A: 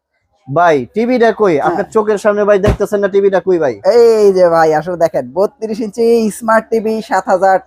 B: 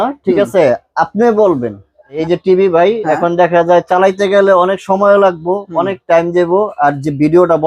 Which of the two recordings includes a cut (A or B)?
B